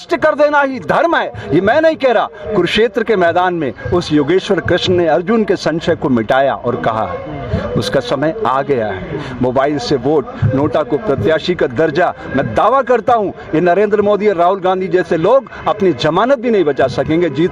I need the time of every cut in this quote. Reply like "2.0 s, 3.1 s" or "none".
none